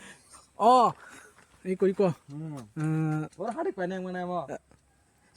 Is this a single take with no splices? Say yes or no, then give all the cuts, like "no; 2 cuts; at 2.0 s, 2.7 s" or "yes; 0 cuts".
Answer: no; 1 cut; at 1.4 s